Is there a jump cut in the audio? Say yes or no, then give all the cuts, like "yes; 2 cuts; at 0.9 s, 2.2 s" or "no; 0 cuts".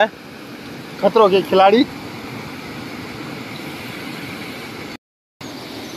yes; 1 cut; at 5.0 s